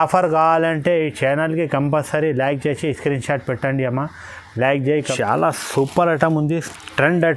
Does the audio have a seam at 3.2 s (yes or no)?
no